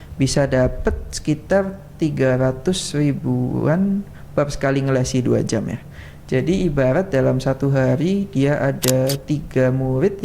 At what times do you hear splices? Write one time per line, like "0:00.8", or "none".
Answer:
none